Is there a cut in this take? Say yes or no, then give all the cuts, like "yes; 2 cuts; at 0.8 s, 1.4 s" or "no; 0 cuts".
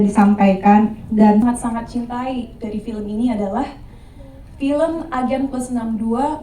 yes; 1 cut; at 1.4 s